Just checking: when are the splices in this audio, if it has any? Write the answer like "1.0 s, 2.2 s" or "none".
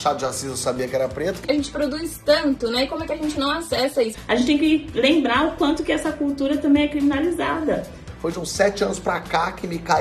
1.4 s, 4.1 s, 8.1 s